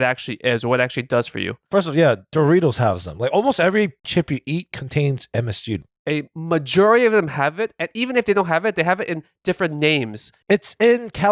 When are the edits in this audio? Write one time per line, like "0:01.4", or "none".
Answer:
0:04.0
0:05.8